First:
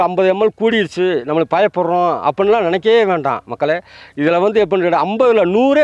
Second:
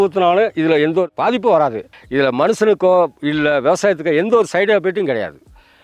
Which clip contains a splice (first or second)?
second